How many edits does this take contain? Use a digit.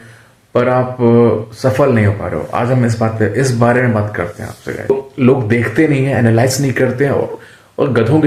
1